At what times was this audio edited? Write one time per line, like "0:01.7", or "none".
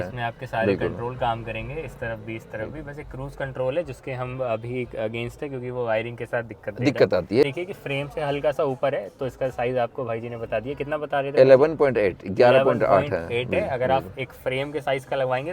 0:07.4